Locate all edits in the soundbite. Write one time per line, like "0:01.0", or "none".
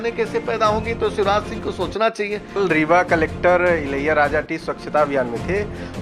0:02.6